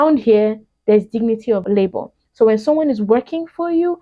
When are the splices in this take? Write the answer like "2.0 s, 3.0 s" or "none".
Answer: 1.6 s